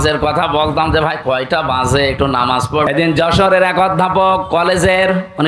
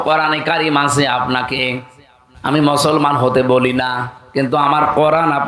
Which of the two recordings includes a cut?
first; 1 cut; at 2.9 s

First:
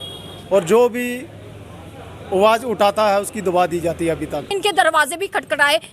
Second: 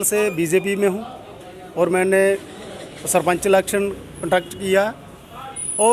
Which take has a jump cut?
first; 1 cut; at 4.5 s

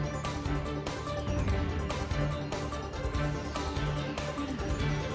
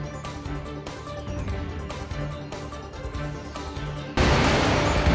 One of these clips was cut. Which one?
second; 1 cut; at 4.1 s

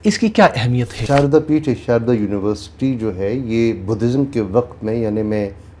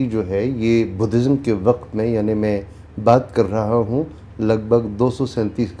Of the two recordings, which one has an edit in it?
first; 1 cut; at 1.0 s

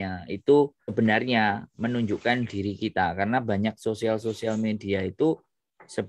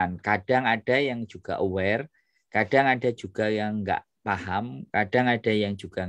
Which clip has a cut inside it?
first; 1 cut; at 0.9 s

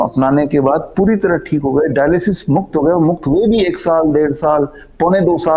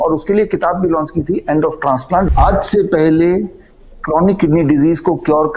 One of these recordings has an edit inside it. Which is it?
second; 1 cut; at 2.3 s

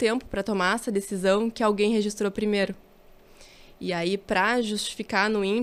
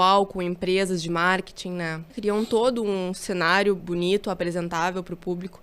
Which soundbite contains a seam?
second; 1 cut; at 2.0 s

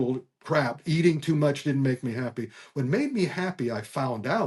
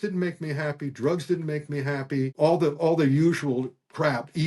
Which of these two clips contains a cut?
second; 1 cut; at 2.3 s

